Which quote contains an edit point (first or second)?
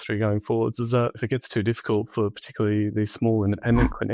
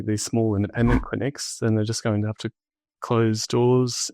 first